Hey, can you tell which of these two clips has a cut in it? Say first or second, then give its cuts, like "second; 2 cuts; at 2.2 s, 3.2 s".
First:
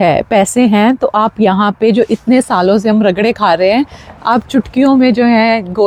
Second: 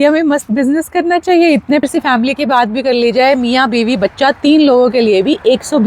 second; 1 cut; at 1.8 s